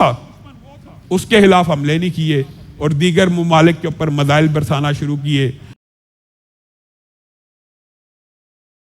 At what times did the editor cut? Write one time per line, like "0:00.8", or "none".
none